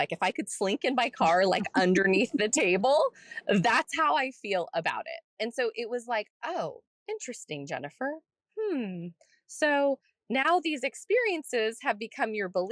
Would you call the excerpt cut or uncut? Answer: cut